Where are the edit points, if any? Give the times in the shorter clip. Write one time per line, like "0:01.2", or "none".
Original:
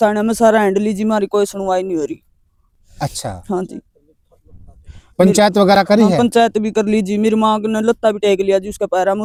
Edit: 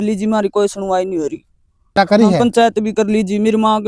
0:02.0